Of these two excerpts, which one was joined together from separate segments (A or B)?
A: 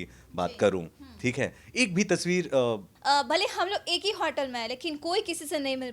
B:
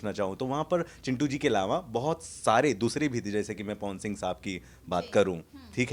A